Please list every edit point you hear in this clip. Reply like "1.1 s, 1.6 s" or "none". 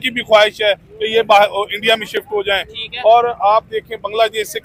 none